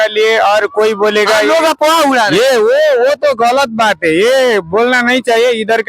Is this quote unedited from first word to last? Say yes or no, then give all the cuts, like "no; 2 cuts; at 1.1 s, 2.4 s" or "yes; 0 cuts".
yes; 0 cuts